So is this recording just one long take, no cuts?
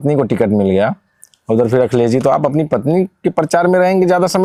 yes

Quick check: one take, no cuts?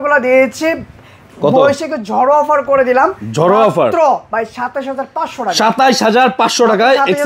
yes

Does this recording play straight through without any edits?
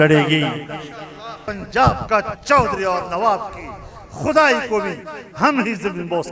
no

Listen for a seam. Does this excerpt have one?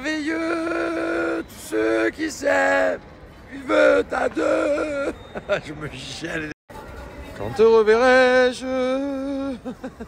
yes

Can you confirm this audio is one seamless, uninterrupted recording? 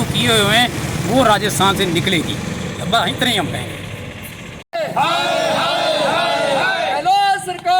yes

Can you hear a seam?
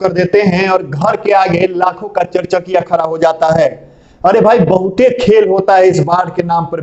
no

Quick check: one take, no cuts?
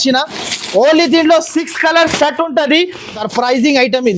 no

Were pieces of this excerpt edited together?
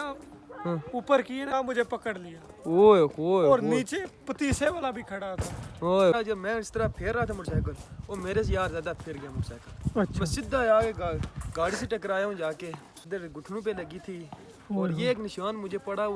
yes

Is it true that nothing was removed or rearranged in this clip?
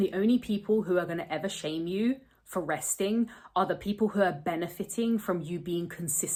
yes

